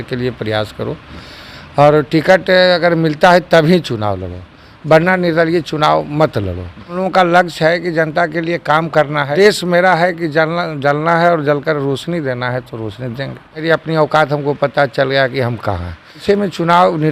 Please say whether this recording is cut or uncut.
cut